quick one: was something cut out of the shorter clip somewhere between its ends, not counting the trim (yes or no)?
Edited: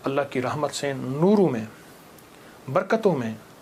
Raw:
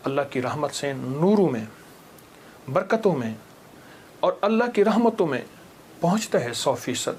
no